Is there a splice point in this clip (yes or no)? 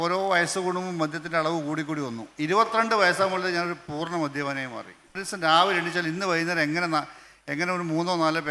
yes